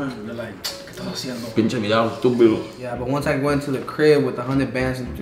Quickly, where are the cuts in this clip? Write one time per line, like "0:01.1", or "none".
0:02.8

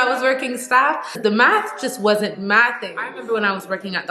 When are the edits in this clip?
0:01.1
0:03.2

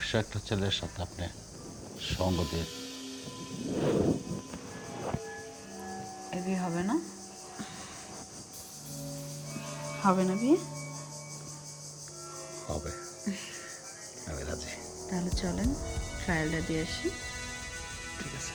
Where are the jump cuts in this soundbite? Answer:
none

